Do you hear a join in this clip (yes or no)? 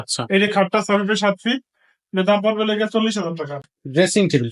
yes